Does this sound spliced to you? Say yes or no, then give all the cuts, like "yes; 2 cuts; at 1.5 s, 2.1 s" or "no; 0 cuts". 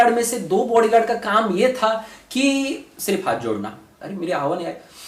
yes; 1 cut; at 3.9 s